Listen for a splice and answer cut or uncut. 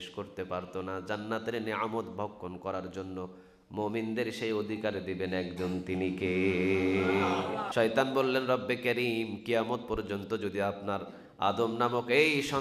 cut